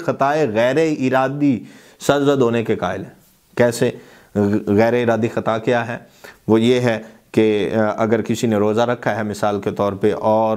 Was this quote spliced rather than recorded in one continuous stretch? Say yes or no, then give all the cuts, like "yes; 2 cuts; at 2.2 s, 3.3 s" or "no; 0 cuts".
no; 0 cuts